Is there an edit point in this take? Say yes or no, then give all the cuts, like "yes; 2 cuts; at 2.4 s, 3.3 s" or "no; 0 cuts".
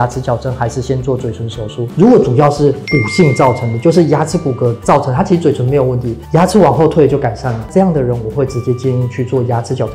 no; 0 cuts